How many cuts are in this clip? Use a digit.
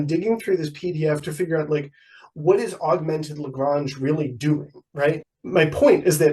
1